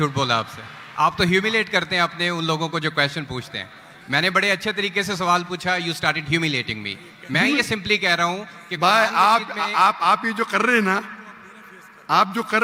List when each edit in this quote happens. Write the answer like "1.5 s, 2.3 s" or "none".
none